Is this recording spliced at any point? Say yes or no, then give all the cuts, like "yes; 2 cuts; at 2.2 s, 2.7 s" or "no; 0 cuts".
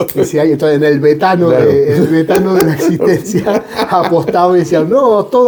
no; 0 cuts